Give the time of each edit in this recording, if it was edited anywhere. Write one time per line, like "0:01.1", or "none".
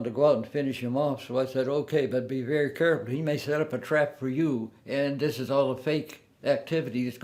none